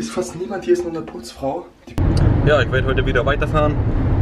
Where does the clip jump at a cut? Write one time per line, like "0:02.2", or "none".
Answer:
0:01.9